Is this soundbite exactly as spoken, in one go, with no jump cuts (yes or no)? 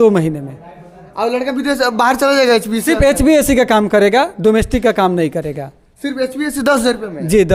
yes